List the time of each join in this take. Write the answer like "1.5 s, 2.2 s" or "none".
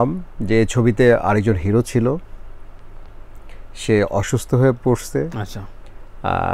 none